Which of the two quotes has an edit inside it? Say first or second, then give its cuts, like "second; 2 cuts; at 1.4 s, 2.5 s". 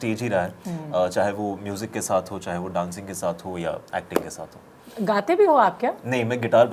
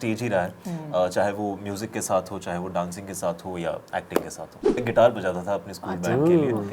second; 1 cut; at 4.8 s